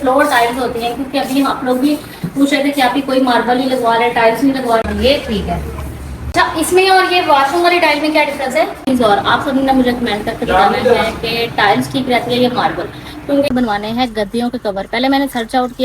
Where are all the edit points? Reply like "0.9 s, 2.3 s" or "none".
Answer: 4.8 s, 6.2 s, 8.8 s, 13.5 s